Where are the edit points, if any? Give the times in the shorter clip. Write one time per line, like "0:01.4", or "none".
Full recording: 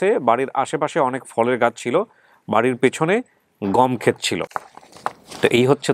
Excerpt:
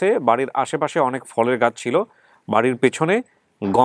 none